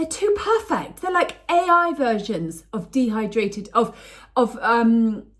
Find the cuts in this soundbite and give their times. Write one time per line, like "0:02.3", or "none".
none